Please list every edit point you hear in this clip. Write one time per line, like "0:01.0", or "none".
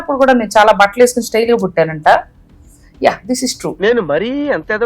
0:02.3